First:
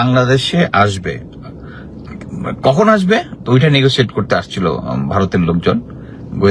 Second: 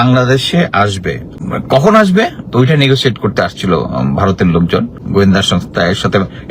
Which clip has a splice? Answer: second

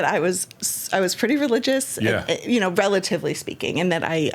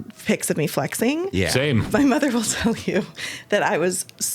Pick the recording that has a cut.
second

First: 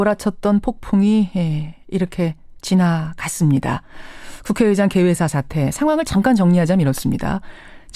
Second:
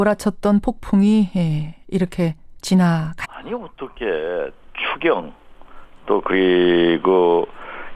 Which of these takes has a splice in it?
first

